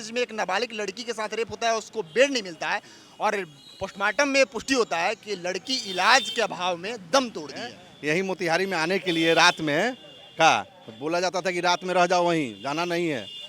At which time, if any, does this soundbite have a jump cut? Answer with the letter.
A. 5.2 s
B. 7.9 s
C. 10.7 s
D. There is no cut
B